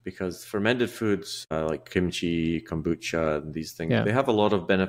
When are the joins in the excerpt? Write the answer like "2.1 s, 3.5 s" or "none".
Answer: 1.5 s